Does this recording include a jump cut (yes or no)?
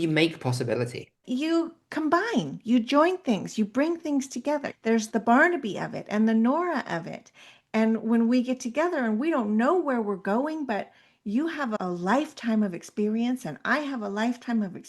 yes